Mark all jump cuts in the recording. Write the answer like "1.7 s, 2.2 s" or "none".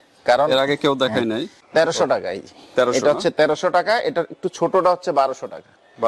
1.5 s